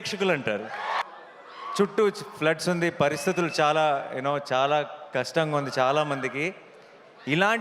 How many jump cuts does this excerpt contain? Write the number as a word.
one